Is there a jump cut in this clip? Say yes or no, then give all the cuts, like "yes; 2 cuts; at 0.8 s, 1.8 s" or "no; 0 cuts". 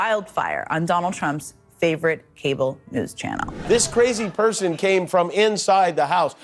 yes; 1 cut; at 3.6 s